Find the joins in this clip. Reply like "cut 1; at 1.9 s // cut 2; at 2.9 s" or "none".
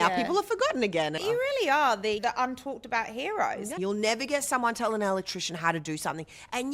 cut 1; at 1.2 s // cut 2; at 2.2 s // cut 3; at 3.7 s

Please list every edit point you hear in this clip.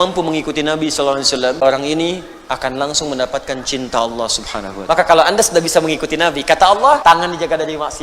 cut 1; at 1.6 s // cut 2; at 4.7 s // cut 3; at 7.0 s

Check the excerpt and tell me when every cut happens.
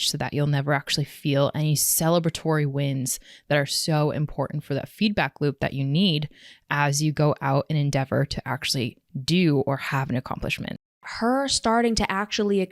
cut 1; at 10.9 s

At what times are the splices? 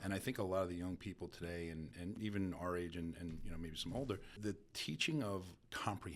cut 1; at 2.2 s // cut 2; at 4.4 s

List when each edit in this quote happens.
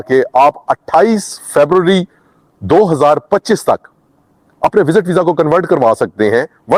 none

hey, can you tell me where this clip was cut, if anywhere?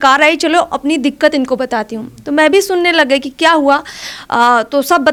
none

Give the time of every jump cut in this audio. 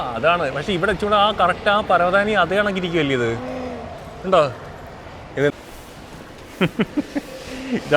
cut 1; at 5.5 s

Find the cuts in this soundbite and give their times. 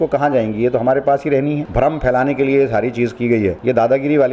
cut 1; at 1.6 s // cut 2; at 3.6 s

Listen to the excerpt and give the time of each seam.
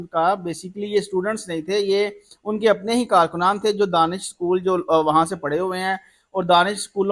none

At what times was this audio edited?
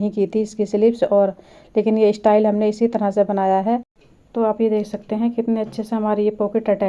cut 1; at 4.0 s

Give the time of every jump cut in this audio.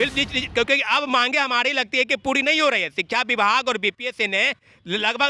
none

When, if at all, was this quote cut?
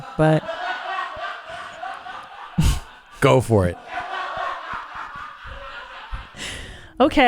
cut 1; at 6.3 s

